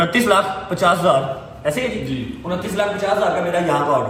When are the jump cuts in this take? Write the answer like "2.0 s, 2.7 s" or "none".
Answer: none